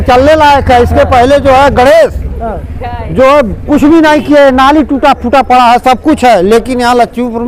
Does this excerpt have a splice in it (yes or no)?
no